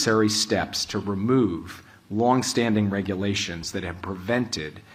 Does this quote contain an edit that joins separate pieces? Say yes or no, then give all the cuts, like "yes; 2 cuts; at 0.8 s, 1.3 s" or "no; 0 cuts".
no; 0 cuts